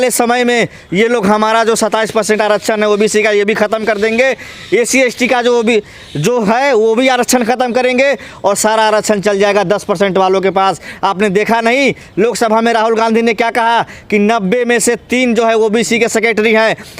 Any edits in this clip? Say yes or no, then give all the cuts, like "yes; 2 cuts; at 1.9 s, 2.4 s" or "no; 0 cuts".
no; 0 cuts